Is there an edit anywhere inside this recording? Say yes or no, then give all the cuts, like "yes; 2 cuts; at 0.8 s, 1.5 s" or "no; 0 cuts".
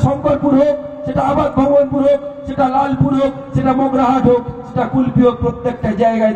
no; 0 cuts